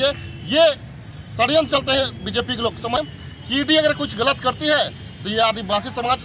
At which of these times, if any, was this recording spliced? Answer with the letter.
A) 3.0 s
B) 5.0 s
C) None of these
A